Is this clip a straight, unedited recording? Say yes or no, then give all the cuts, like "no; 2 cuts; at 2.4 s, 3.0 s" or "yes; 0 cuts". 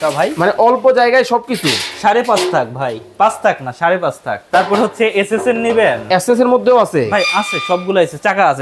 no; 1 cut; at 4.4 s